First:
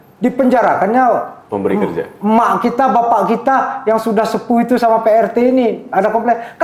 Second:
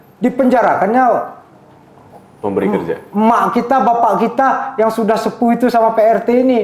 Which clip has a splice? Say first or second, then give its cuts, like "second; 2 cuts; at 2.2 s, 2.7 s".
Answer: first; 1 cut; at 1.4 s